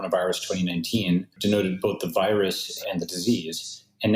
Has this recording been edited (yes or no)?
yes